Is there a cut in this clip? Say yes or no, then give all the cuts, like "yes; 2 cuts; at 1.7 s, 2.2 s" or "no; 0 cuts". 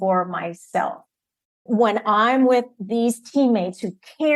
yes; 1 cut; at 1.5 s